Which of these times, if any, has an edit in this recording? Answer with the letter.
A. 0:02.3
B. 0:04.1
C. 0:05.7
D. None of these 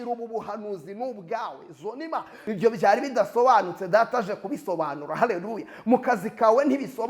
A